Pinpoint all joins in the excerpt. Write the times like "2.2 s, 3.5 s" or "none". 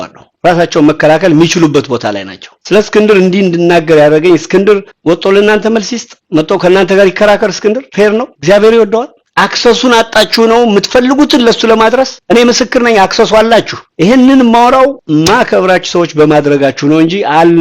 13.8 s